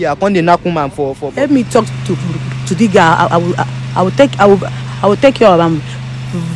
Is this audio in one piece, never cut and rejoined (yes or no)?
no